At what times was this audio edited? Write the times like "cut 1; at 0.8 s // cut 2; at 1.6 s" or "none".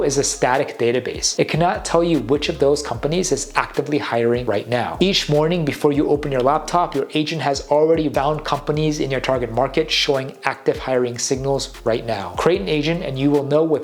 cut 1; at 1.2 s // cut 2; at 4.9 s // cut 3; at 8.1 s // cut 4; at 12.3 s